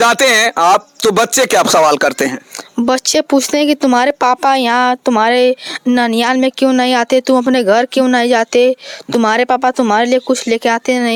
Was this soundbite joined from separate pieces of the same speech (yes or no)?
no